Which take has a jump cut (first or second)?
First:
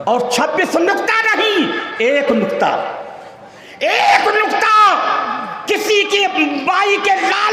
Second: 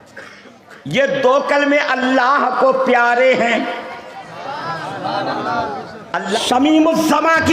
second